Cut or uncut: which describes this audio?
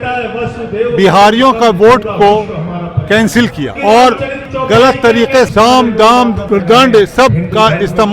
cut